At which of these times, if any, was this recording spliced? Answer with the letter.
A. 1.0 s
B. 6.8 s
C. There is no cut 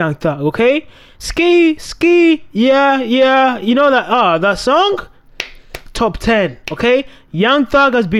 C